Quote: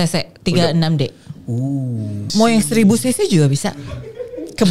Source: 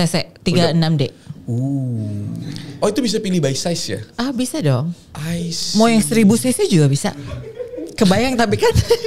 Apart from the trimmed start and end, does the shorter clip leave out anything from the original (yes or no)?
yes